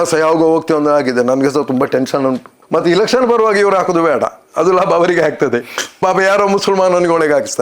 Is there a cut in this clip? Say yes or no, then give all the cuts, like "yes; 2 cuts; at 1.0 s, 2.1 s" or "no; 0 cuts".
yes; 1 cut; at 5.8 s